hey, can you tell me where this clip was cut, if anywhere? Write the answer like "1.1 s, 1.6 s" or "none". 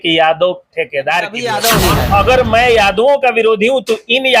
1.4 s